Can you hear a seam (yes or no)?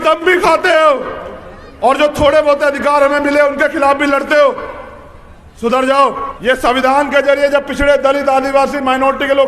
yes